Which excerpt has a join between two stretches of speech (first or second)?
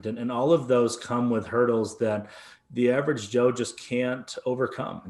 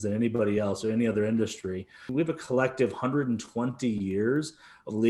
second